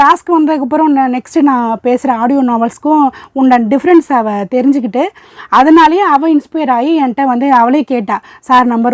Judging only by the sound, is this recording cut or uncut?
uncut